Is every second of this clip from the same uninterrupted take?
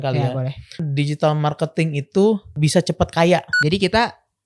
no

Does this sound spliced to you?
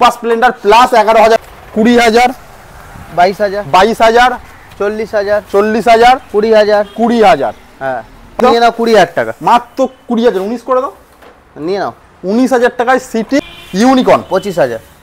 yes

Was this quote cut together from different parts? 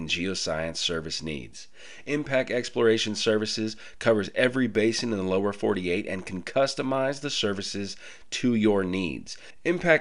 no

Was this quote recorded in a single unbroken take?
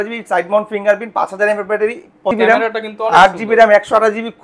no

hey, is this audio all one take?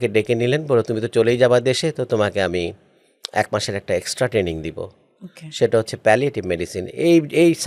yes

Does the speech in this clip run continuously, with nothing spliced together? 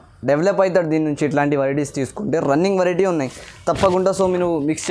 yes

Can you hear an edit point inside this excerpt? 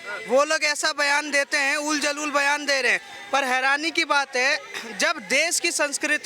no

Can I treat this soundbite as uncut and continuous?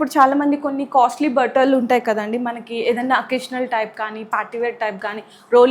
yes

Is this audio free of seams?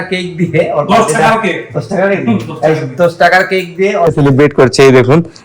no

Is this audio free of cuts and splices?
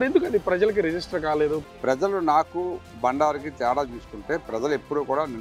no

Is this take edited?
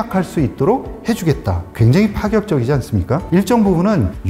yes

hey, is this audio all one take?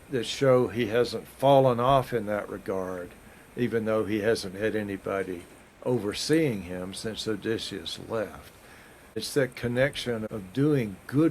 no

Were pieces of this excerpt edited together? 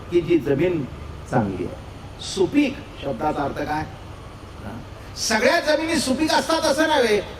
no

